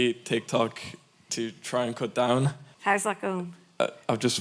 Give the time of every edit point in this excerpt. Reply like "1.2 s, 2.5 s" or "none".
2.7 s